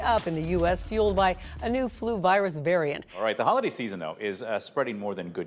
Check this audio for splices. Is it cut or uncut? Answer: cut